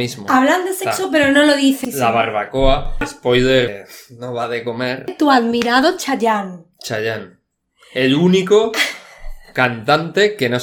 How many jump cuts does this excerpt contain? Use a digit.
4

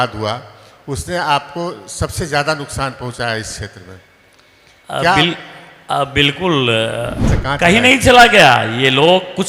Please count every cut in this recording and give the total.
1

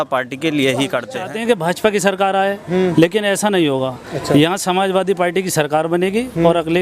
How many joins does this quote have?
1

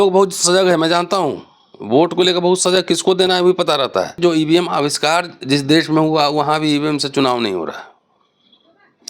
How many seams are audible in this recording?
1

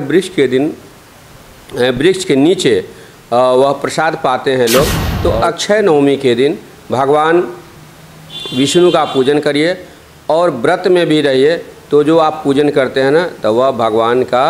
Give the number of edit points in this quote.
1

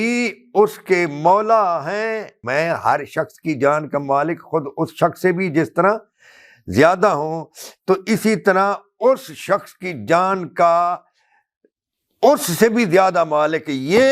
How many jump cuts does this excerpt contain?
1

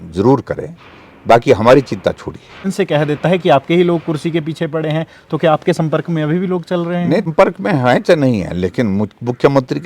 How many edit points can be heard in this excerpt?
2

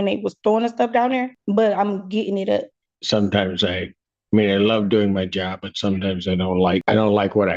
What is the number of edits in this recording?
3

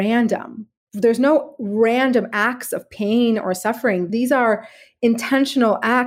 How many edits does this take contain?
1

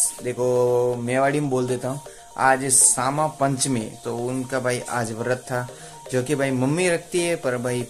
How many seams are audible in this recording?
1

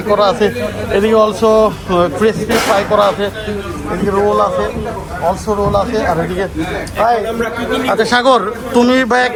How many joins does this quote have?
0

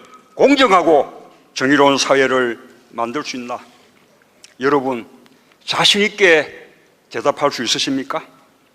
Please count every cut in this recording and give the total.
1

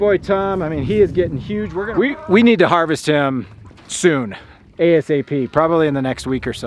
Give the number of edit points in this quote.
1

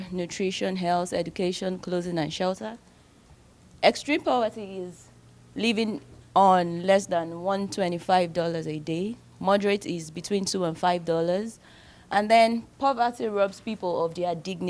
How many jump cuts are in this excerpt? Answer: 1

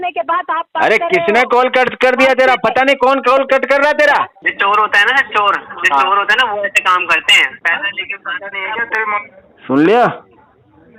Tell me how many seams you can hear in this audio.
1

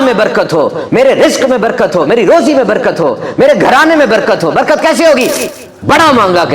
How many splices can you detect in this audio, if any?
1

